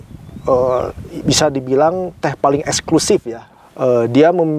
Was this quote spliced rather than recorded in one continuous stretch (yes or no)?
yes